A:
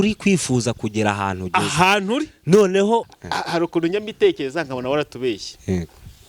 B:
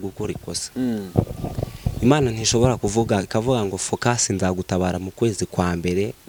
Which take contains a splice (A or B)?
A